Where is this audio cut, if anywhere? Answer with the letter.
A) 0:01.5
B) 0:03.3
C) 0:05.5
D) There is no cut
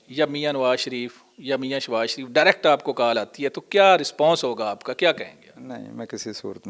D